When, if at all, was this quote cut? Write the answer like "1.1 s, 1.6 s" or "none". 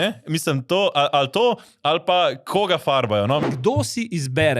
3.3 s